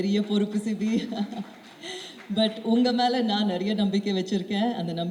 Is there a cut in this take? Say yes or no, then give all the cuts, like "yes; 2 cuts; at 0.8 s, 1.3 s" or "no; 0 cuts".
no; 0 cuts